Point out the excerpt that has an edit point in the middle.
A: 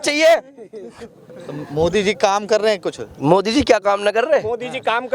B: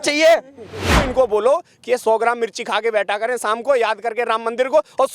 B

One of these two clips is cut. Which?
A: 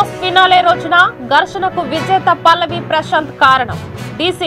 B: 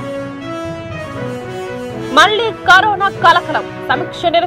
B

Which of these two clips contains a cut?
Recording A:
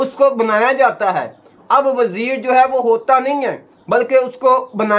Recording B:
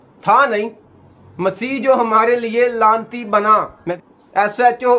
B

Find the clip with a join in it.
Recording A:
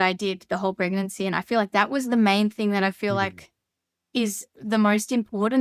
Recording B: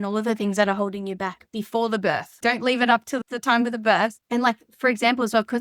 B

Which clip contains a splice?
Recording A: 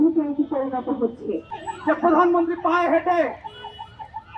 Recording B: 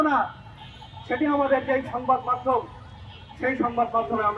A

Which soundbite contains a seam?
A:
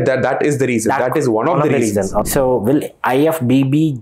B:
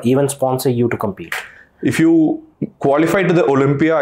A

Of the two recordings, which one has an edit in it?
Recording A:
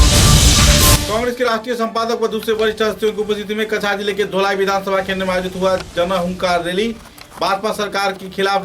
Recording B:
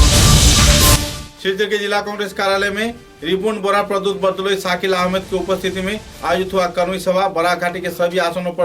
A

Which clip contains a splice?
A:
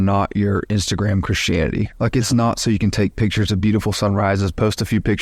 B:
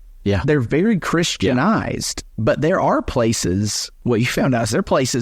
B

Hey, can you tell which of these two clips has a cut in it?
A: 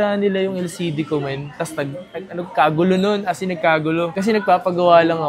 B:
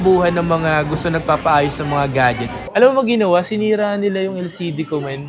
B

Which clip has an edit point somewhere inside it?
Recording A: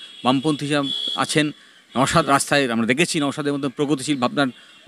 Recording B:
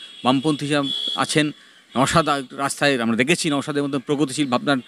A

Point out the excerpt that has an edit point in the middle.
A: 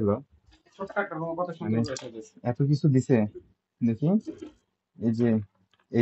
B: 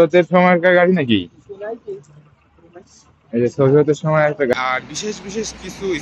B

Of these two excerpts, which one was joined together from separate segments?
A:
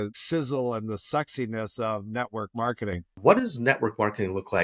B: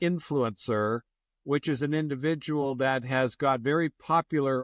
A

